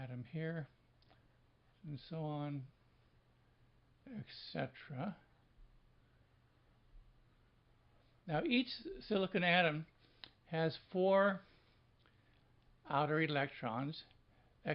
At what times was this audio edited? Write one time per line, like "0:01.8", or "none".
0:08.6

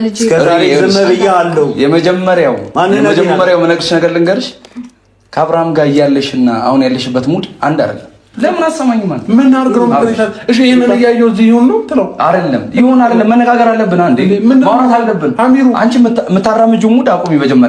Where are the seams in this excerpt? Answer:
0:08.2

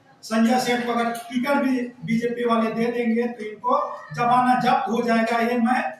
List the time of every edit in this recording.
none

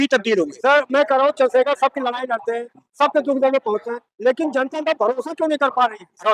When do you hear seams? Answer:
none

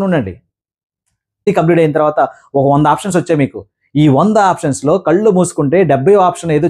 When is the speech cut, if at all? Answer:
0:01.5

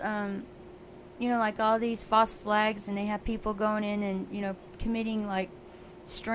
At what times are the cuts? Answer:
0:01.6

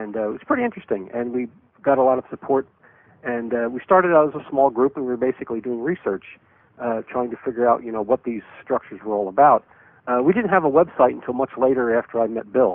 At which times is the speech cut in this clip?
none

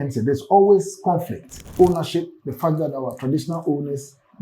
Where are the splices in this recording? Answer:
0:01.7

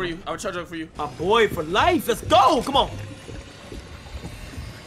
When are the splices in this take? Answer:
0:00.9

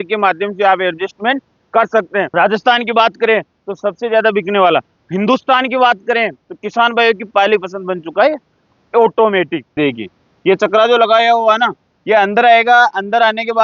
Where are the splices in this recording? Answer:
0:02.3
0:09.8

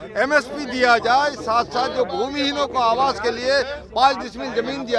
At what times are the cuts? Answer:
none

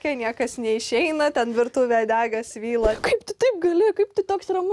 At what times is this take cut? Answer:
0:03.0

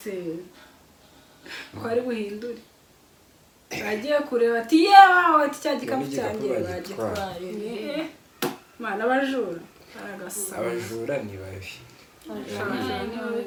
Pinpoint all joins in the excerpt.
none

